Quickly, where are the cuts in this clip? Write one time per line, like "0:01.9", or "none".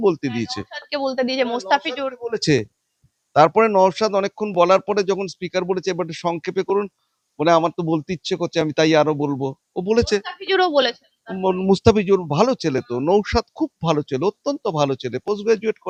none